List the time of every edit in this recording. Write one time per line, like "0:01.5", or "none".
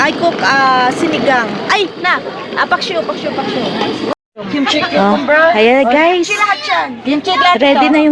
0:04.1